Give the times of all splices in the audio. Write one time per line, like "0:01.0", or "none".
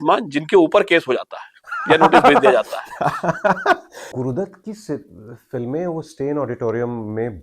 0:04.1